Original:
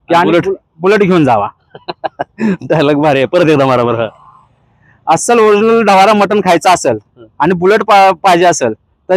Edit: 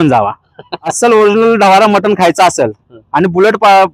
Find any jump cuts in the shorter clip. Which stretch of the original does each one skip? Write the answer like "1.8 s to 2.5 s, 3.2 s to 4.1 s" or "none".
2.1 s to 5.2 s